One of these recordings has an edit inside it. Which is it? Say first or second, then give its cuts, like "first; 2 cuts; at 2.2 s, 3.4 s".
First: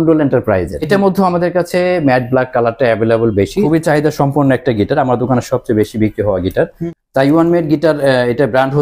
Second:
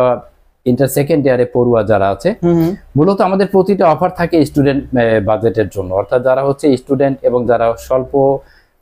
first; 3 cuts; at 0.9 s, 3.7 s, 6.8 s